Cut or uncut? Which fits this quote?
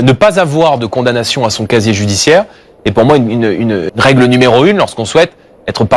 cut